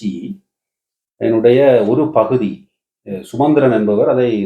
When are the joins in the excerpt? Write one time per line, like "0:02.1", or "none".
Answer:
none